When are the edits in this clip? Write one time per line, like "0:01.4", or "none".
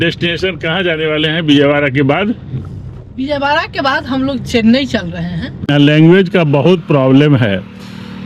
0:05.7